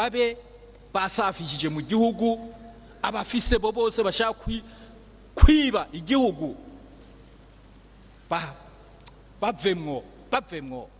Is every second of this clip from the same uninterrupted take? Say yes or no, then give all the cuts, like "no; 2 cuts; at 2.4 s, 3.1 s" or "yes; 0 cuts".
yes; 0 cuts